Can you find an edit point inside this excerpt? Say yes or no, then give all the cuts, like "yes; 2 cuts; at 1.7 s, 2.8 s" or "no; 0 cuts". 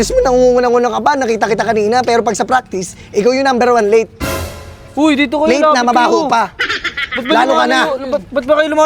no; 0 cuts